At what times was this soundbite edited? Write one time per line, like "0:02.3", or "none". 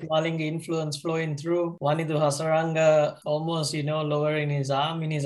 0:01.7
0:03.2